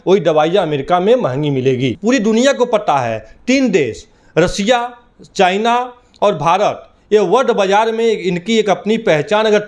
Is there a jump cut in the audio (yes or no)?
yes